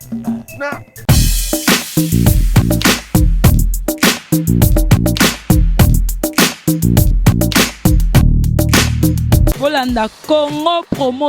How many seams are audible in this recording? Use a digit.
1